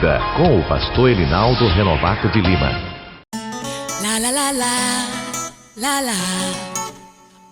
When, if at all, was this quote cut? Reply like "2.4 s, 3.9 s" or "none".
3.1 s